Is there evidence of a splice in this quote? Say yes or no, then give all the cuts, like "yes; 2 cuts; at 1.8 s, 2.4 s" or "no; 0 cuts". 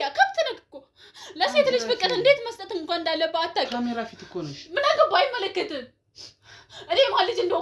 no; 0 cuts